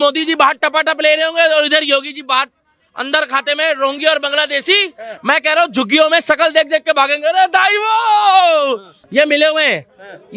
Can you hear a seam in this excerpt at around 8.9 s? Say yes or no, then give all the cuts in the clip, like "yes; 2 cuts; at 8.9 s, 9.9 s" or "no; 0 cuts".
yes; 1 cut; at 8.9 s